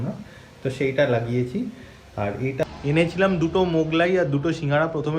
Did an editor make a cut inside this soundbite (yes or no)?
yes